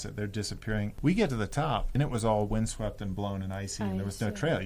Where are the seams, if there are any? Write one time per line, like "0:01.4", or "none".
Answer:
0:00.9
0:01.9